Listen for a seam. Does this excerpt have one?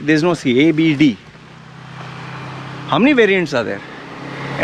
no; 0 cuts

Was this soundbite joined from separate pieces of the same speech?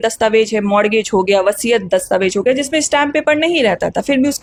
no; 0 cuts

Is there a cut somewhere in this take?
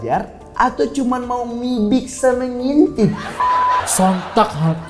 yes; 1 cut; at 3.3 s

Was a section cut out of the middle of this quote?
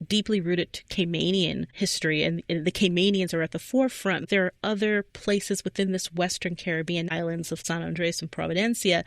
yes; 2 cuts; at 4.3 s, 7.2 s

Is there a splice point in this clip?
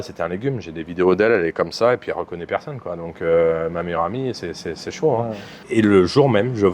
yes; 1 cut; at 5.5 s

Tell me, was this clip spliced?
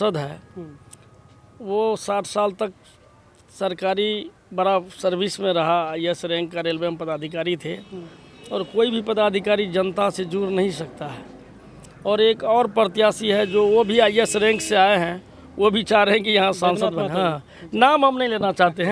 no; 0 cuts

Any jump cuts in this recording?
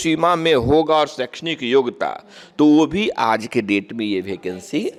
no; 0 cuts

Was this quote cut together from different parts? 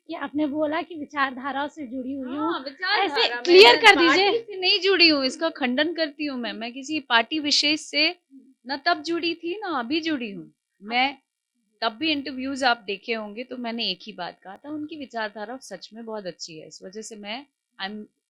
no; 0 cuts

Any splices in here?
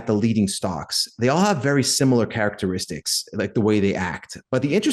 no; 0 cuts

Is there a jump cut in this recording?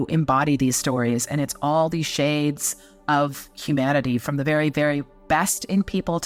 no; 0 cuts

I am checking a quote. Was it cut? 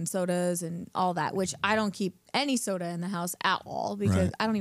no; 0 cuts

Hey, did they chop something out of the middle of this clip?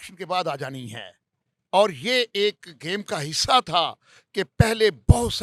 no; 0 cuts

